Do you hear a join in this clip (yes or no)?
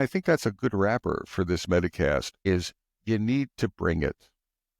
yes